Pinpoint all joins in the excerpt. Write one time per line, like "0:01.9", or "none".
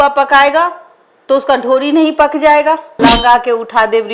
0:02.9